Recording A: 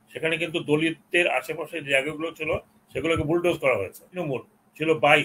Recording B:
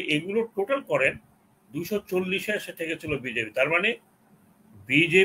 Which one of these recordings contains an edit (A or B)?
A